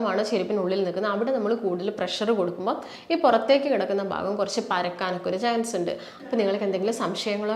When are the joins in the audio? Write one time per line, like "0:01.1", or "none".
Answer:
0:06.2